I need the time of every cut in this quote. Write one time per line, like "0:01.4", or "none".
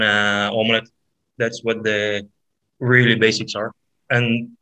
none